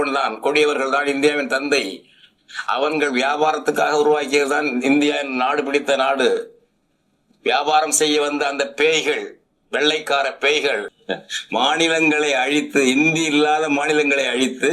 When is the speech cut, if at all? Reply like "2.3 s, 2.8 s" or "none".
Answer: 10.9 s